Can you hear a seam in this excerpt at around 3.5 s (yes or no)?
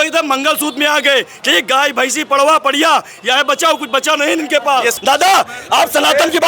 no